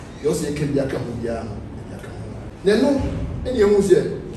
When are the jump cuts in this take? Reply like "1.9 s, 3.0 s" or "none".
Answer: 2.4 s